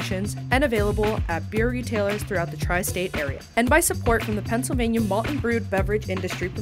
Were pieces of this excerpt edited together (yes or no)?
yes